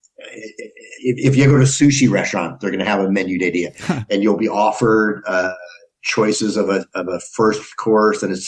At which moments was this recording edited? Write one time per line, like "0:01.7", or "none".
0:03.9